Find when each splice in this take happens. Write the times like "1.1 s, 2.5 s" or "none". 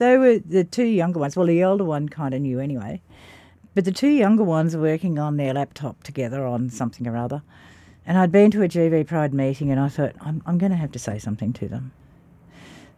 none